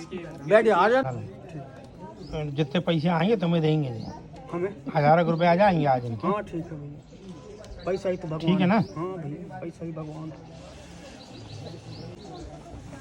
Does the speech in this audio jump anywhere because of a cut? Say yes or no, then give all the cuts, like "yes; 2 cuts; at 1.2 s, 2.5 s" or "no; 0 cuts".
yes; 2 cuts; at 1.0 s, 12.2 s